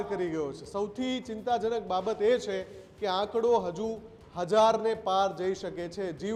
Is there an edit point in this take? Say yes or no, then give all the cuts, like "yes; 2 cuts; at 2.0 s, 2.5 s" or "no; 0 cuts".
no; 0 cuts